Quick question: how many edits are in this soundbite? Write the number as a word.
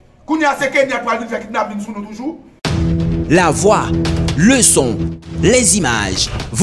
one